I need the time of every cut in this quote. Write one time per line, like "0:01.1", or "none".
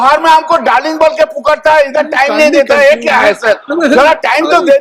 none